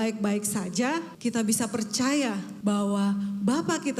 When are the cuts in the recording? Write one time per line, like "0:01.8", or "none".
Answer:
0:01.1
0:02.5

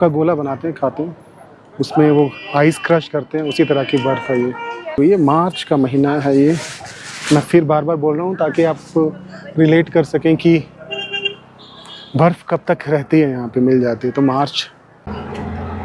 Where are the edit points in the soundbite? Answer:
0:05.0
0:15.0

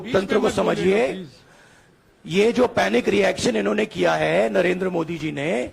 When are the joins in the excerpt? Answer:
none

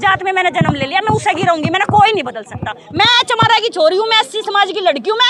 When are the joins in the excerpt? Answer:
none

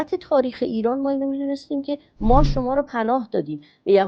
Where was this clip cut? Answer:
none

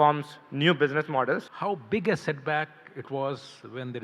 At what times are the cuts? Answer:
0:01.5

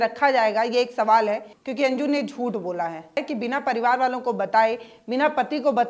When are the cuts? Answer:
0:01.6
0:03.2

